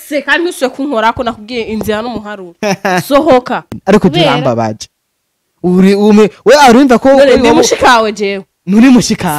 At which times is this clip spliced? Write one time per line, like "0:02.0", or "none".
0:03.8